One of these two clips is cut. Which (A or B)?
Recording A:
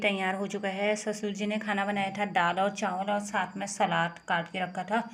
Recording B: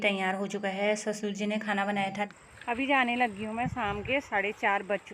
B